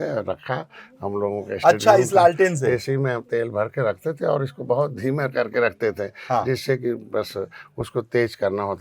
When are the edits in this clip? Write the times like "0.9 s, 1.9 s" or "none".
none